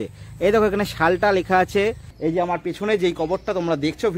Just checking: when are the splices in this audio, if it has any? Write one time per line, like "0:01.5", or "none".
0:02.1